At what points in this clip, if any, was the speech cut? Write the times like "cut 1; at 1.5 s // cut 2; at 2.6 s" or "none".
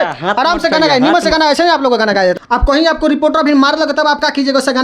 cut 1; at 2.4 s

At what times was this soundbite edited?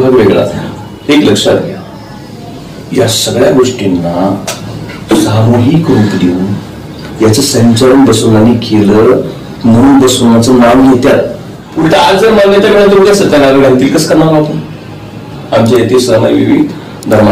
cut 1; at 11.6 s

